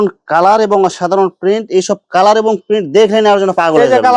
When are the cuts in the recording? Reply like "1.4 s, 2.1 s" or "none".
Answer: none